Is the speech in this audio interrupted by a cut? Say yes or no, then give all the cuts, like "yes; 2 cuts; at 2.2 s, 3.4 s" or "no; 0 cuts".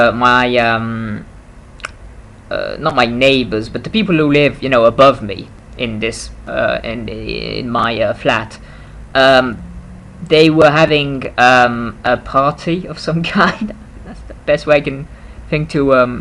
no; 0 cuts